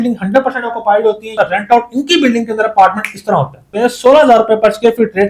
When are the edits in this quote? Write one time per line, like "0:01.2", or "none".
0:01.3
0:03.7